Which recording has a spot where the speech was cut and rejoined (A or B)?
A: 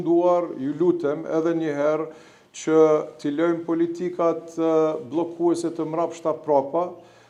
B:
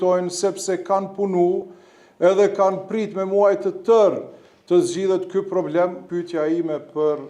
B